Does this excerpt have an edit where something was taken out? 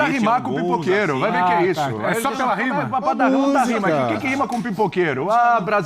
no; 0 cuts

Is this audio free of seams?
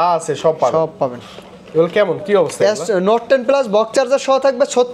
yes; 0 cuts

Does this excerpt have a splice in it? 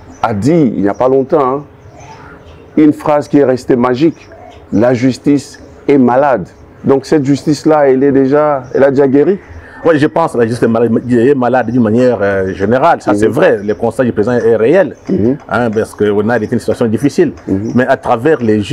no; 0 cuts

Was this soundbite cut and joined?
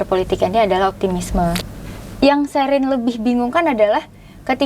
yes; 1 cut; at 1.7 s

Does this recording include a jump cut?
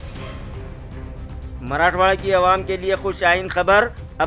yes; 1 cut; at 1.5 s

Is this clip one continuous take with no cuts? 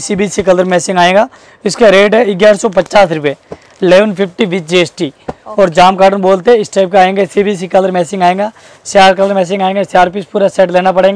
yes; 0 cuts

